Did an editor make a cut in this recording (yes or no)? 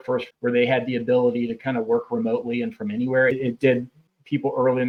no